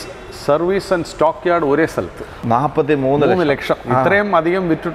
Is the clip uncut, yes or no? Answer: no